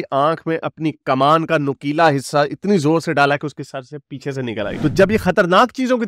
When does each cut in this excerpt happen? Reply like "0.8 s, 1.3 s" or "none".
4.8 s

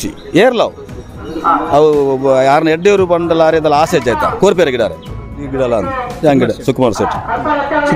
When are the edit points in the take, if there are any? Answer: 5.4 s

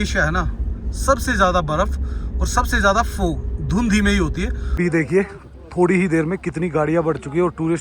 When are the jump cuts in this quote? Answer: 4.6 s

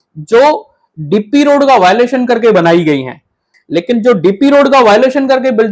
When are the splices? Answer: 3.5 s

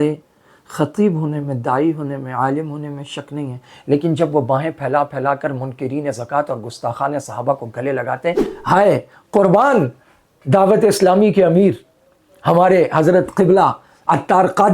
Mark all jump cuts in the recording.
8.5 s

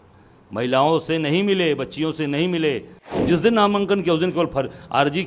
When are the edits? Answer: 3.0 s

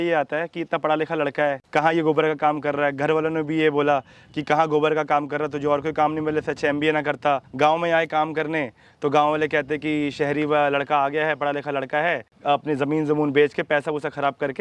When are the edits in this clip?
1.6 s, 7.5 s, 12.3 s

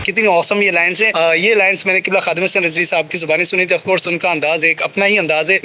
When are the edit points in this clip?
1.1 s

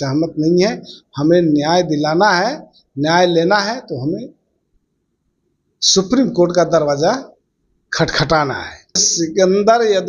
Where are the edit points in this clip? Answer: 9.1 s

